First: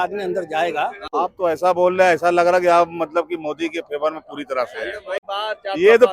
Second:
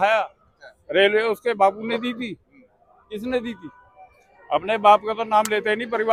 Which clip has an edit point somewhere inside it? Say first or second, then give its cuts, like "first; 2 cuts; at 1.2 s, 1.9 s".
first; 2 cuts; at 1.0 s, 5.2 s